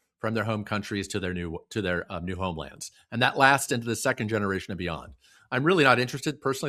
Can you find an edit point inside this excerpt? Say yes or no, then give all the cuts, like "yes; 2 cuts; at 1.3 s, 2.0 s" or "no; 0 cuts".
no; 0 cuts